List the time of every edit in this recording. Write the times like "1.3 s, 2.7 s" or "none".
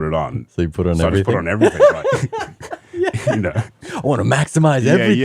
3.9 s